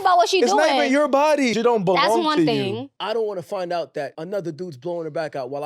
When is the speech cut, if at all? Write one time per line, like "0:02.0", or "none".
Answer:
0:01.5
0:02.9
0:04.2